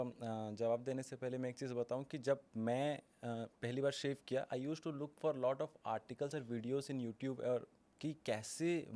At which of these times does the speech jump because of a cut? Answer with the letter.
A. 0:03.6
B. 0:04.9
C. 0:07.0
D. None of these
D